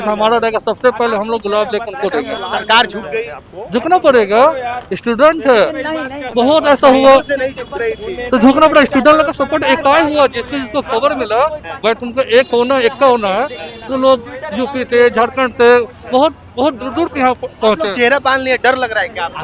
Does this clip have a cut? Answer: no; 0 cuts

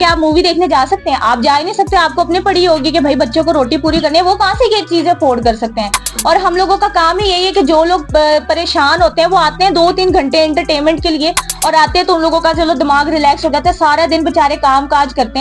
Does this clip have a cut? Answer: no; 0 cuts

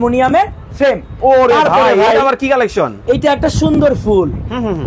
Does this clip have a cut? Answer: yes; 1 cut; at 1.1 s

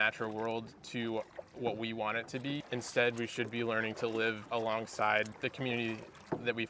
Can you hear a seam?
yes; 2 cuts; at 4.4 s, 5.3 s

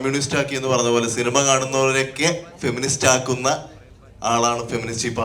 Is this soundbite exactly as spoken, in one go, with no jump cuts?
yes; 0 cuts

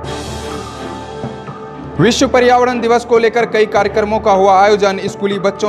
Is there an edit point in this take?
yes; 1 cut; at 1.3 s

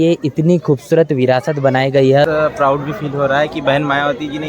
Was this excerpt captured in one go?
no; 1 cut; at 2.2 s

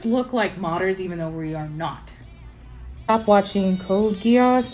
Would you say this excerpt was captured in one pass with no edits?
no; 1 cut; at 3.1 s

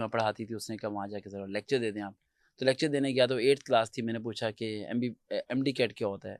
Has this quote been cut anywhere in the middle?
no; 0 cuts

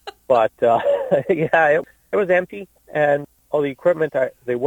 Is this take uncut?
no; 2 cuts; at 1.8 s, 3.2 s

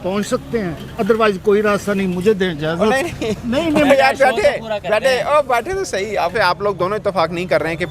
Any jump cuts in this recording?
yes; 1 cut; at 6.3 s

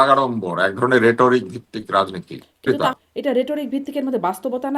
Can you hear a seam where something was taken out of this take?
yes; 1 cut; at 2.8 s

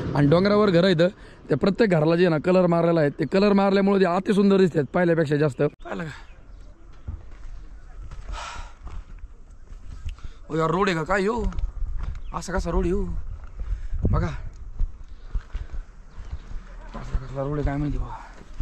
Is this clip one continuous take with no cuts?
no; 1 cut; at 5.8 s

